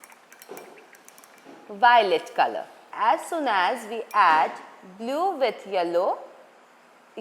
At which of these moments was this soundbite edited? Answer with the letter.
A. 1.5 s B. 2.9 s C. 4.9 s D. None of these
B